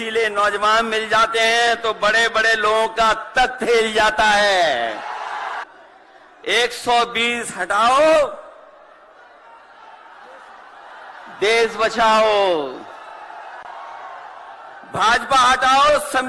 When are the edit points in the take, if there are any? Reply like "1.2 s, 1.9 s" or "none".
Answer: 5.6 s